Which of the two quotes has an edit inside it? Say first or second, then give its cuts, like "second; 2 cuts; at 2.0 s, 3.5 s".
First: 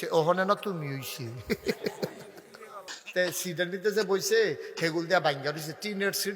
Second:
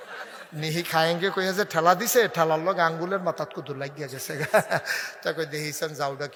first; 1 cut; at 3.0 s